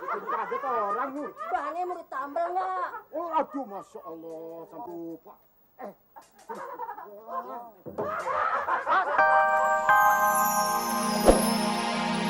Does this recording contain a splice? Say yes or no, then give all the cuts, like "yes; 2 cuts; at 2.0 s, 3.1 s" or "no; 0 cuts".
yes; 1 cut; at 9.2 s